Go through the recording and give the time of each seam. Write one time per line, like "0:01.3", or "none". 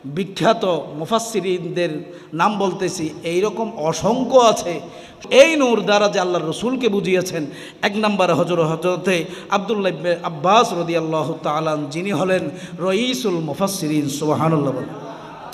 0:05.2